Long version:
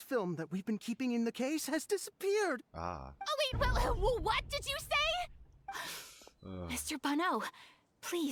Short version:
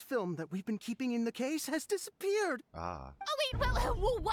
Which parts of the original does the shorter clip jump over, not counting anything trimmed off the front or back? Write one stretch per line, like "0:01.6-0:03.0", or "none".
none